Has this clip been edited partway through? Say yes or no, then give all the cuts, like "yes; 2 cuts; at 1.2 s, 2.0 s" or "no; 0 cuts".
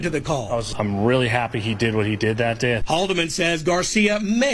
no; 0 cuts